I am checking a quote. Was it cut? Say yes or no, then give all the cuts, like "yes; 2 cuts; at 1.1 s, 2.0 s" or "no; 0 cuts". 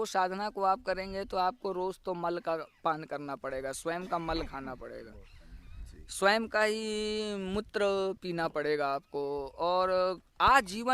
no; 0 cuts